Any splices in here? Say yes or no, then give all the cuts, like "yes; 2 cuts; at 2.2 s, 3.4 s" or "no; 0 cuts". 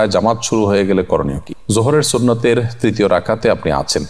no; 0 cuts